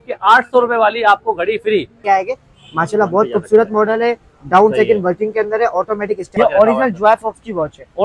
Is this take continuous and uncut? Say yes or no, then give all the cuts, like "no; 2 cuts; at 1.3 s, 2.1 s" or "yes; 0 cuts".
no; 2 cuts; at 2.0 s, 6.3 s